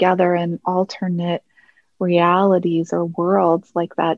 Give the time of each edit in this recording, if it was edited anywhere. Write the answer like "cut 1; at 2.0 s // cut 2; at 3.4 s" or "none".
none